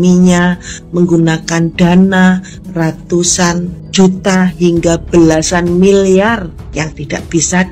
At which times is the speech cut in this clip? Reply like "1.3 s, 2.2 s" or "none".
3.8 s, 6.6 s